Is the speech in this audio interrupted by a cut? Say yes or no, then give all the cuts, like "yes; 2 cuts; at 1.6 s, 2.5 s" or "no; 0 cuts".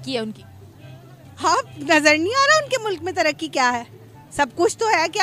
no; 0 cuts